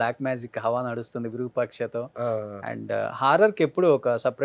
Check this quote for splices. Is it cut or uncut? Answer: uncut